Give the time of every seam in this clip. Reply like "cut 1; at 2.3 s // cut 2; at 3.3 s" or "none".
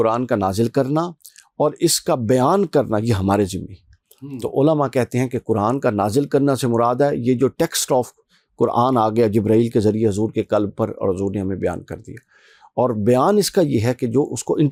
none